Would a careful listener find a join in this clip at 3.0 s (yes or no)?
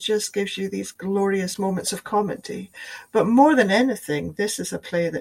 no